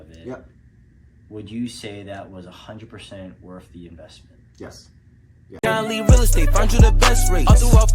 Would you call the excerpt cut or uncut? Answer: cut